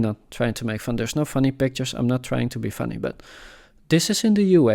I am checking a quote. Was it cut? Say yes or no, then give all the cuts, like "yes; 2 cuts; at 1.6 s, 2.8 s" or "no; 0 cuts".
no; 0 cuts